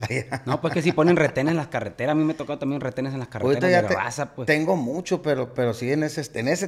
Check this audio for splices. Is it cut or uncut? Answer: uncut